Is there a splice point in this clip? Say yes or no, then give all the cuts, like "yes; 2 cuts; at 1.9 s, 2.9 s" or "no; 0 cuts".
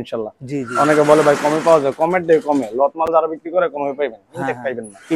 no; 0 cuts